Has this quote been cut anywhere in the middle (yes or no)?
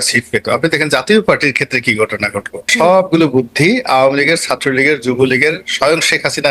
yes